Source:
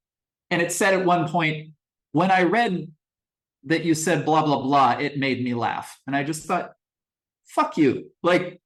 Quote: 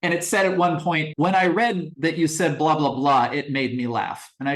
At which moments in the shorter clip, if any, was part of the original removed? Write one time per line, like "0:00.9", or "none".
0:01.1
0:01.9